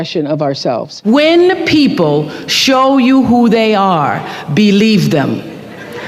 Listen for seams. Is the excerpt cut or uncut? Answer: cut